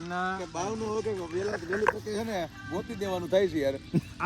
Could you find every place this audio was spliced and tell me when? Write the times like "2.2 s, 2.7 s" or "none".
none

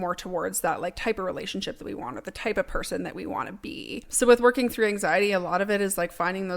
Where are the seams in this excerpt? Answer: 4.1 s

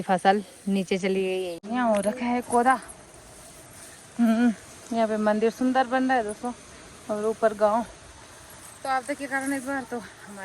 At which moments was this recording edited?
1.6 s

